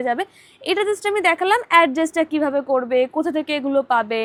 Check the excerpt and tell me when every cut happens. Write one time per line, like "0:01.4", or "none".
none